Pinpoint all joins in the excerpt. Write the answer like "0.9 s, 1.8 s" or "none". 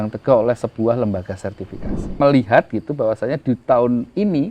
2.2 s